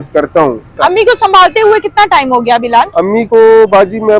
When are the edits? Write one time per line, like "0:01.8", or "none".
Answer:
0:00.8
0:02.9